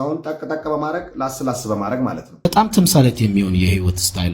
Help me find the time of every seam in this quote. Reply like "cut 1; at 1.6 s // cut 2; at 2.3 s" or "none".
cut 1; at 2.4 s